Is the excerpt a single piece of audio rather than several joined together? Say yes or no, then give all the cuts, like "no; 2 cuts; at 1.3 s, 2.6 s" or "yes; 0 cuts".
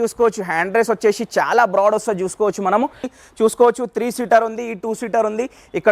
no; 1 cut; at 3.0 s